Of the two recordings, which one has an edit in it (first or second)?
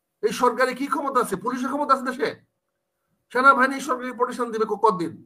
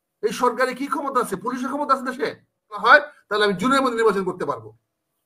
second